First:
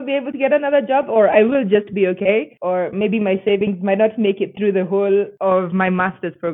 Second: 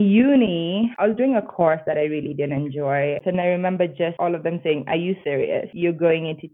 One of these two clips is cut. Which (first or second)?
second